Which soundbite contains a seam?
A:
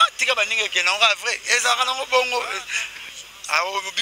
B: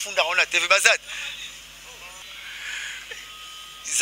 B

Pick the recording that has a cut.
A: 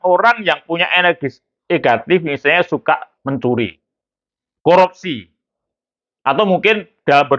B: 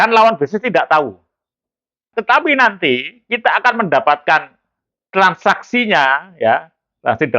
B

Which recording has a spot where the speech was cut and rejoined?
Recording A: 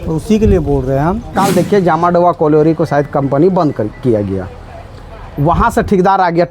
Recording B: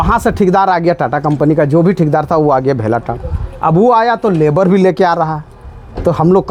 A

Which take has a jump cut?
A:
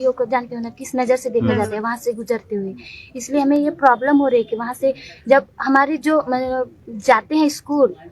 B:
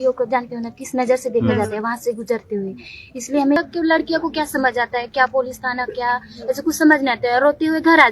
B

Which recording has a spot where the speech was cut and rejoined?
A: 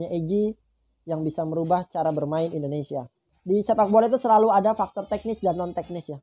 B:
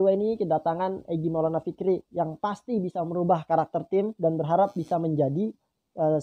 A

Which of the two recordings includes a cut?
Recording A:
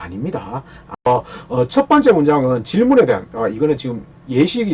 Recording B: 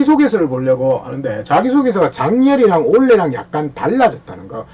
A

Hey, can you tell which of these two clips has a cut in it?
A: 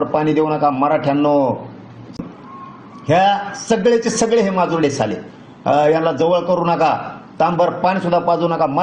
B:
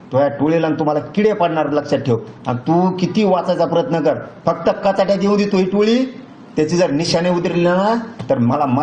A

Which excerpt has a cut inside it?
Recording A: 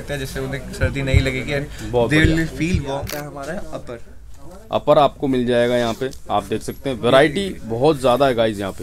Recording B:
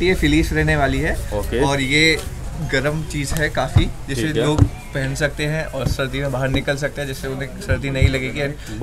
A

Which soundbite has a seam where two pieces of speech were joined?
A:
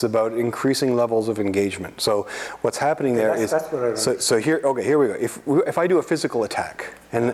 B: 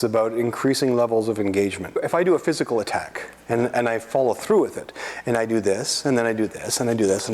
B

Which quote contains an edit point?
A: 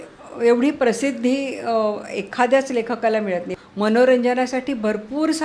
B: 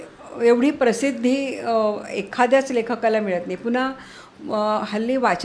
A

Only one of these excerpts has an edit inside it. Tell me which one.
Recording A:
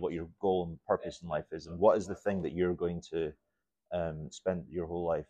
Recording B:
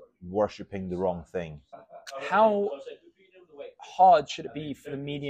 B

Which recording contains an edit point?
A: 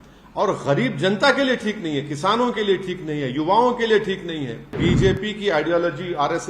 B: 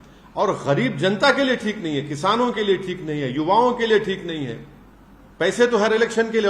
A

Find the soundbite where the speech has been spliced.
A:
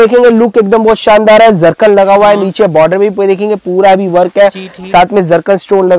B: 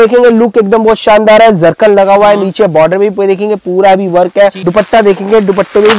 B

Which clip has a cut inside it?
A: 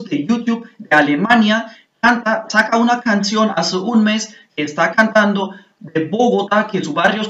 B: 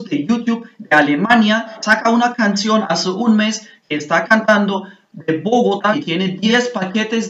B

